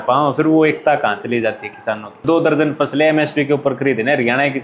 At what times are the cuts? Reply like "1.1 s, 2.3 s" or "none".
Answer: 2.2 s